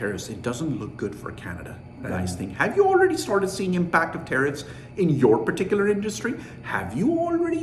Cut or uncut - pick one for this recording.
cut